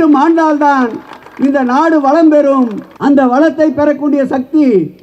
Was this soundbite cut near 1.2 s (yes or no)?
no